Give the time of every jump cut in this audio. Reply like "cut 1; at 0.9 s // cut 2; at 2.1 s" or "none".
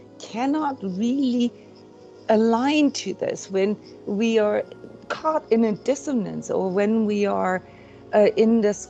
none